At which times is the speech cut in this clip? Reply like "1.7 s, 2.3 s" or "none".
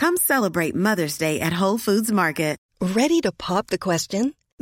2.6 s